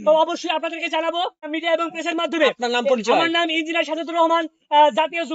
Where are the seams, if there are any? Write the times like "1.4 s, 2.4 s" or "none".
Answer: 1.5 s